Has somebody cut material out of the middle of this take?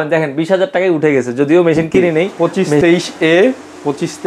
yes; 1 cut; at 2.3 s

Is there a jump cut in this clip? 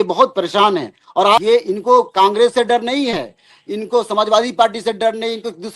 yes; 1 cut; at 1.4 s

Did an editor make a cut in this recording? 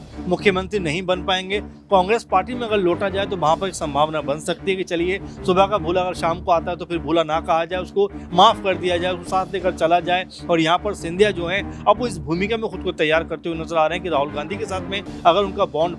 no; 0 cuts

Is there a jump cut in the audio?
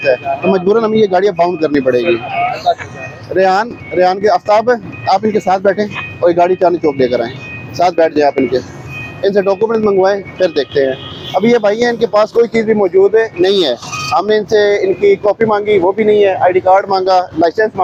no; 0 cuts

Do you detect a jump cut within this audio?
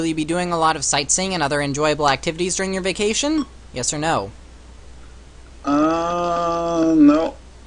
yes; 1 cut; at 2.5 s

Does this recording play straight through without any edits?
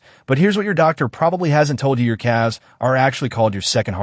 yes; 0 cuts

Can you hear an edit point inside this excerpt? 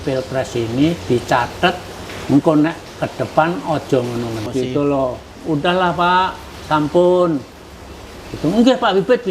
yes; 1 cut; at 4.5 s

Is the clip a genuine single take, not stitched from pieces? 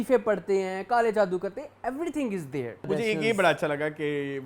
no; 1 cut; at 2.9 s

